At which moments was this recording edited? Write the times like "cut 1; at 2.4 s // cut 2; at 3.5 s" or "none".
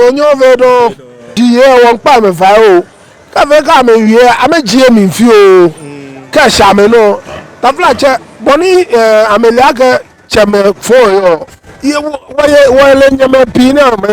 cut 1; at 1.3 s